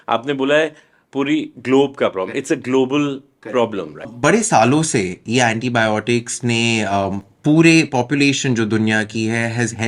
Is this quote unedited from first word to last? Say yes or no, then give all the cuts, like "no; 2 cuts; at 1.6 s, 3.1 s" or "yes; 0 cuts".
no; 1 cut; at 4.1 s